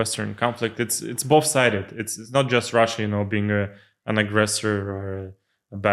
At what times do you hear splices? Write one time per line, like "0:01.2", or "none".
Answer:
none